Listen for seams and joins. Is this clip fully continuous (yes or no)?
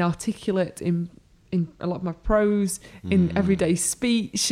yes